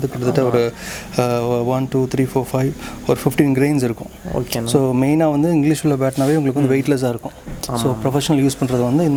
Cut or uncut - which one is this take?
uncut